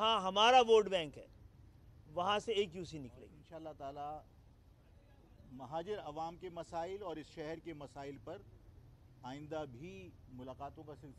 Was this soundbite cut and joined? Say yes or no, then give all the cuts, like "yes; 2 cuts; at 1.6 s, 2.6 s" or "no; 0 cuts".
yes; 1 cut; at 3.4 s